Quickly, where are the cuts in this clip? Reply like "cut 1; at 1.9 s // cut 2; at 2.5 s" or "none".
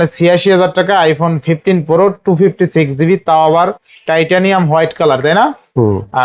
none